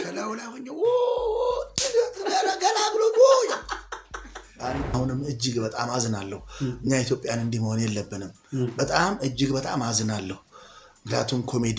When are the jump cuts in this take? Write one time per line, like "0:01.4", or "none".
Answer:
0:04.8